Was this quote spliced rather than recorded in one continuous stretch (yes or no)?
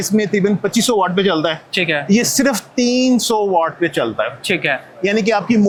no